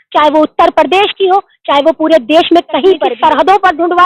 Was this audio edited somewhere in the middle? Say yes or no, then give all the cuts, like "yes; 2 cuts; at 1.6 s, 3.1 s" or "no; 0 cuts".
yes; 1 cut; at 3.1 s